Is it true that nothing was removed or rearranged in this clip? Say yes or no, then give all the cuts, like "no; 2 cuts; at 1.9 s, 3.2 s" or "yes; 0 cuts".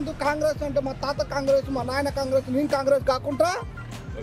yes; 0 cuts